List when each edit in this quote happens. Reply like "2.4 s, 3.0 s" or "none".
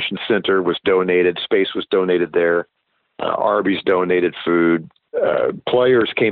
5.0 s